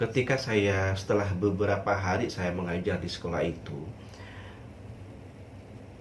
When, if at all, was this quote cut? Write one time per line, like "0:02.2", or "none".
none